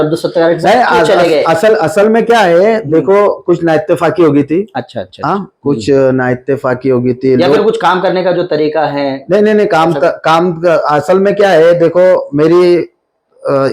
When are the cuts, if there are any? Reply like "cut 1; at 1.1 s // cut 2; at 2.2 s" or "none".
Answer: none